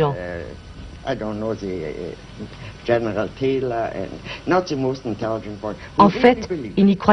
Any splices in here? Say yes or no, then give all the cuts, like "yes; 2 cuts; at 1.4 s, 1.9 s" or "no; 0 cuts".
yes; 1 cut; at 4.2 s